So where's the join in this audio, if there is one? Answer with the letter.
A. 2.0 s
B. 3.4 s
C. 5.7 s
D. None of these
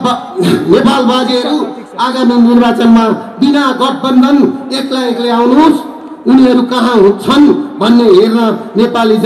D